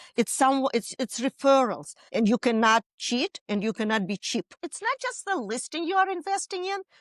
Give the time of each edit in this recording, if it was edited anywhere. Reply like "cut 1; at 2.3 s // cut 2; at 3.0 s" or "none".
cut 1; at 2.0 s // cut 2; at 4.6 s